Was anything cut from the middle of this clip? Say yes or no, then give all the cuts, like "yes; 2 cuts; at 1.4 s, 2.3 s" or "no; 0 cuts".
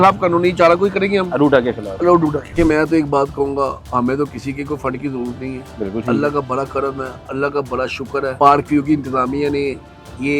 yes; 2 cuts; at 2.5 s, 8.3 s